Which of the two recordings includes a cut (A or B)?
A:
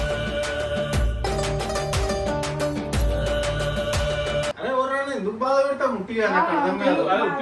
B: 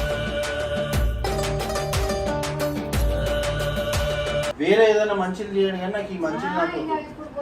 B